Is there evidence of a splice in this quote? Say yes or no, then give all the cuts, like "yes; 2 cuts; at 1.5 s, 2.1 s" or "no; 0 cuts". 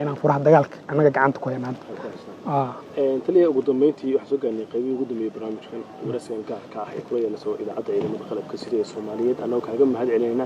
no; 0 cuts